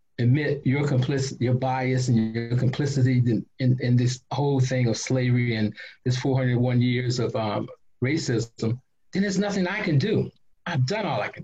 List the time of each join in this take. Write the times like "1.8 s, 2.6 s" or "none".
none